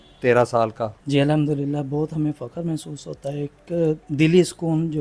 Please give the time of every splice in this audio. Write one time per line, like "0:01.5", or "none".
0:01.0